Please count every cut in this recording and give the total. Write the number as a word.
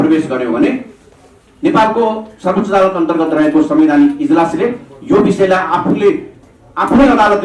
zero